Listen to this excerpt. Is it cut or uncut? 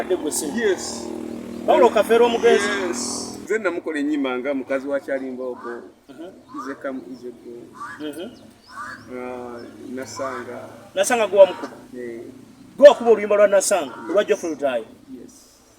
cut